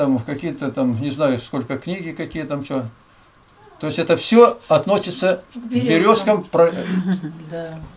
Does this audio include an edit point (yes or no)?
no